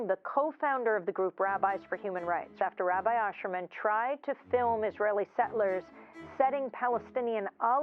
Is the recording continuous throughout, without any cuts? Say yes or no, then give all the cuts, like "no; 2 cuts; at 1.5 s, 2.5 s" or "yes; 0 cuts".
no; 1 cut; at 2.5 s